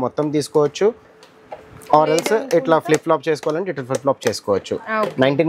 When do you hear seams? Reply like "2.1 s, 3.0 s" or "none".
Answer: none